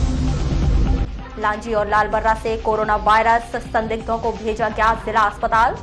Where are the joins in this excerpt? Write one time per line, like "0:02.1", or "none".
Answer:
0:00.9